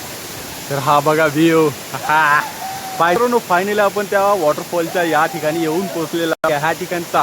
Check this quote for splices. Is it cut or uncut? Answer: cut